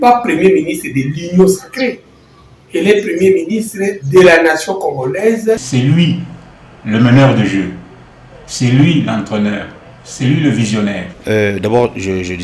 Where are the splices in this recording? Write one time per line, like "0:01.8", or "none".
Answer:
0:05.6
0:11.1